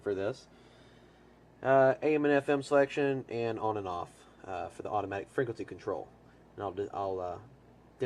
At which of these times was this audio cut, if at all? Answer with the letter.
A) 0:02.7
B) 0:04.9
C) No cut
C